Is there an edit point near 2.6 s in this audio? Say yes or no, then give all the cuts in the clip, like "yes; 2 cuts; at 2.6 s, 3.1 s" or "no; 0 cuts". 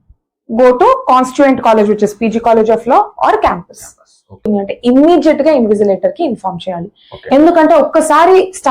no; 1 cut; at 4.5 s